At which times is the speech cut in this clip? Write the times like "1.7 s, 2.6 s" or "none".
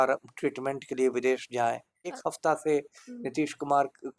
2.1 s